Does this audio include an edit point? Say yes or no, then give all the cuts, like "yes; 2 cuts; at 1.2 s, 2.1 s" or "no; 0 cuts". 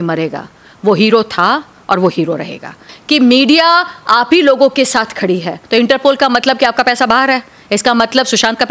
yes; 2 cuts; at 2.9 s, 5.6 s